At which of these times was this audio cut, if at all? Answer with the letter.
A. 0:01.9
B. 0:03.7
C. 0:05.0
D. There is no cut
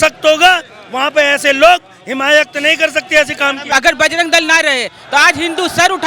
B